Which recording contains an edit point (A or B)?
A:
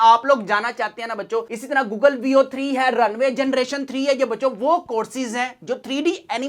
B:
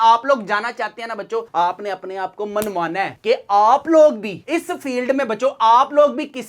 A